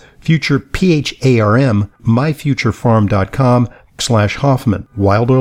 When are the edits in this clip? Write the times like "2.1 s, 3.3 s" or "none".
2.0 s, 3.8 s